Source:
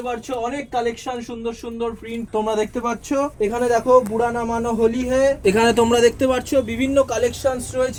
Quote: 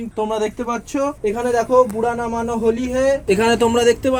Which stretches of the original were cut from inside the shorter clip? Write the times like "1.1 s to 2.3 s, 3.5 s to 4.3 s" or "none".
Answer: none